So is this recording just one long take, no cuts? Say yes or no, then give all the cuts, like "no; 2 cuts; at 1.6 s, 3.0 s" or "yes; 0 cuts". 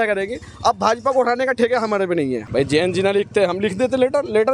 no; 1 cut; at 2.4 s